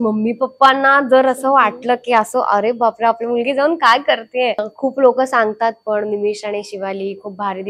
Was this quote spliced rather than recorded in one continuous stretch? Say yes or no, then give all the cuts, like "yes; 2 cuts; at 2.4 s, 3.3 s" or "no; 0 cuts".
yes; 1 cut; at 4.7 s